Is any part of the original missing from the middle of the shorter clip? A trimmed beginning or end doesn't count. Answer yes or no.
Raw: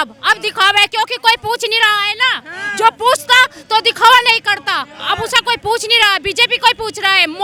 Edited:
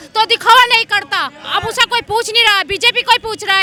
no